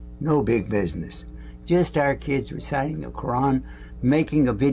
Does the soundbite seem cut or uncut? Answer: uncut